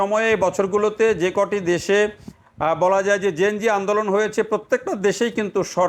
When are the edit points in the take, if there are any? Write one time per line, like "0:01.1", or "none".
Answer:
none